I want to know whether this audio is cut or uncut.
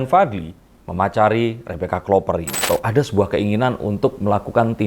cut